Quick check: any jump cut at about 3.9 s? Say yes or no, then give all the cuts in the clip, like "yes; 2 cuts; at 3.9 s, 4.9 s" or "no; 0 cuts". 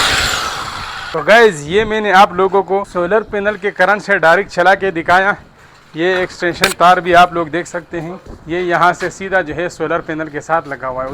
no; 1 cut; at 1.0 s